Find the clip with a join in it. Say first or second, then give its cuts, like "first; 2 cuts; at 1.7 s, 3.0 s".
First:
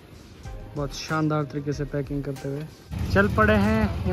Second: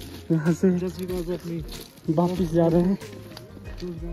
first; 1 cut; at 2.9 s